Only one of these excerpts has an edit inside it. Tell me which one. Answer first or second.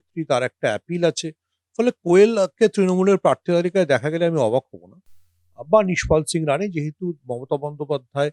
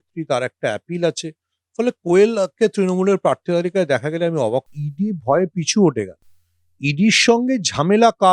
second